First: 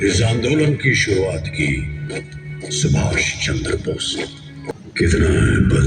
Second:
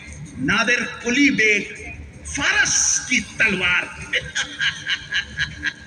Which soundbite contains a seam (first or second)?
first